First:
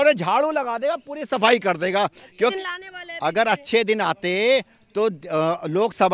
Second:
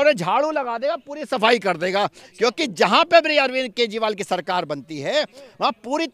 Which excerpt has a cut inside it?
first; 1 cut; at 2.5 s

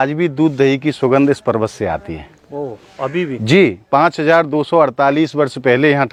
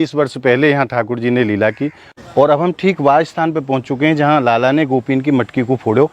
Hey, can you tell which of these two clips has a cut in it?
second; 1 cut; at 2.1 s

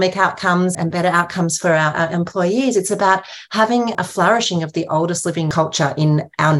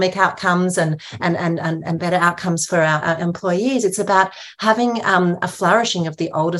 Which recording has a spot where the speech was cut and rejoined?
first; 3 cuts; at 0.7 s, 3.9 s, 5.5 s

